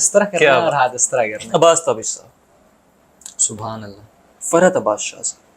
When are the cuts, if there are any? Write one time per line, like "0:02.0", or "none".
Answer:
0:01.4
0:04.3